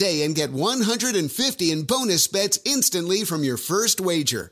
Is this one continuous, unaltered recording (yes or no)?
yes